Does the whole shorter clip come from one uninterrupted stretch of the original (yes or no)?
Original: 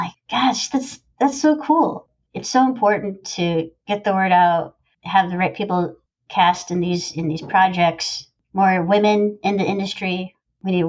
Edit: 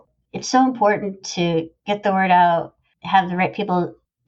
yes